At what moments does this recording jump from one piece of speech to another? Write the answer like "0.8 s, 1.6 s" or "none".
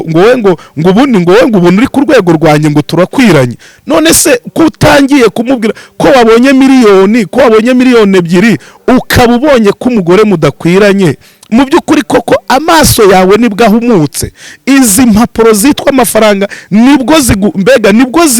none